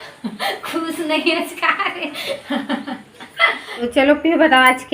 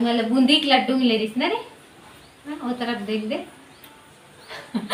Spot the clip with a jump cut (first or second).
first